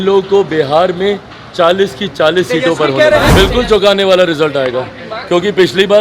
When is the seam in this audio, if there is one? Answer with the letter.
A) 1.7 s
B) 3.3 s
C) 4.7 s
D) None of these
B